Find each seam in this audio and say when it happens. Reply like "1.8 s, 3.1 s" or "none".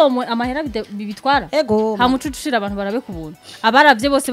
none

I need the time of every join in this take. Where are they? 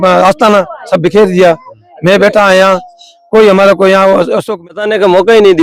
4.7 s

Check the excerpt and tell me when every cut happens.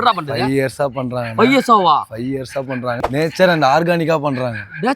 3.2 s

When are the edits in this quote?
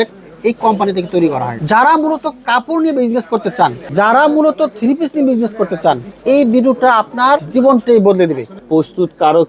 1.5 s, 3.8 s, 6.1 s, 7.5 s, 8.6 s

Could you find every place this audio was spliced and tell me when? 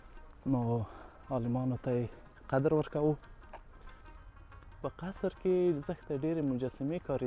4.0 s

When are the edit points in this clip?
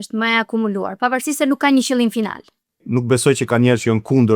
2.8 s

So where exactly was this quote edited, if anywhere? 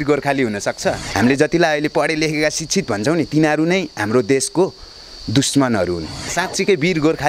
1.0 s, 6.3 s

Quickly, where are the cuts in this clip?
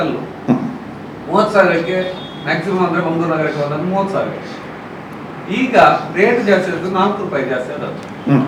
none

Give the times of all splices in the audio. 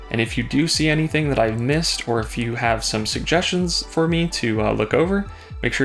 none

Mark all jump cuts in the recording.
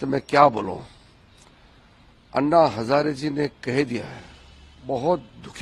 none

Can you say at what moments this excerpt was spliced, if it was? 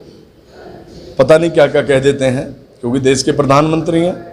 none

